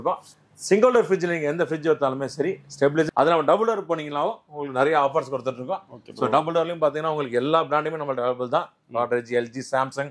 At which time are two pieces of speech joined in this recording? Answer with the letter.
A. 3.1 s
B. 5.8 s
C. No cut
A